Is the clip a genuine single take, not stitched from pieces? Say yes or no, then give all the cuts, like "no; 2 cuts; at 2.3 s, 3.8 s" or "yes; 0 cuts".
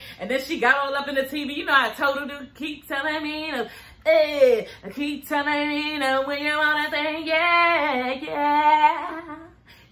yes; 0 cuts